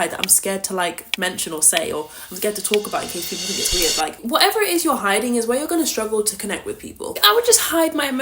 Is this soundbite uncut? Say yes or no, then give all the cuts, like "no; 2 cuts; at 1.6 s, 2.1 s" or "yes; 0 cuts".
no; 2 cuts; at 4.2 s, 7.2 s